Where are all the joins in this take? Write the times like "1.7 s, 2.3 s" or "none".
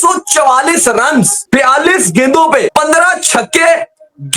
1.4 s, 2.7 s